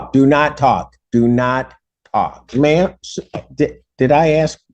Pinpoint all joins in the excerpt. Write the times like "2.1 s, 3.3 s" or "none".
2.5 s